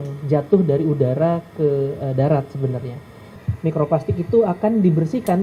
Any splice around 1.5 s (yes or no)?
no